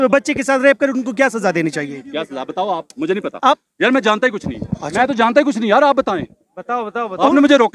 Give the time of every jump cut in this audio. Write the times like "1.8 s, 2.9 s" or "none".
none

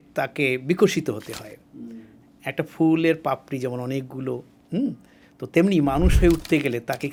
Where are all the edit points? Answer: none

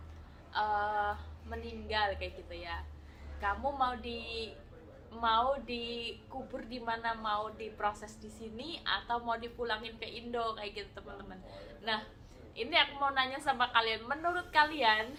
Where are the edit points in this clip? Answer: none

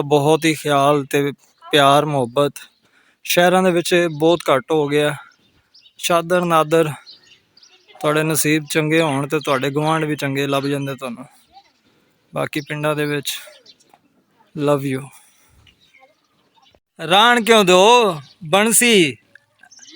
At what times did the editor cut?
16.9 s

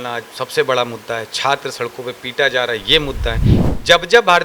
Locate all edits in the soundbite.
3.5 s

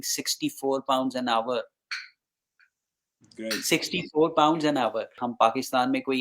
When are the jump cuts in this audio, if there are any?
5.2 s

